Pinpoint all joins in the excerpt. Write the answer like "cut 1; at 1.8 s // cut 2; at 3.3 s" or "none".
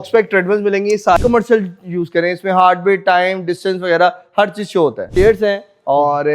cut 1; at 1.2 s // cut 2; at 5.0 s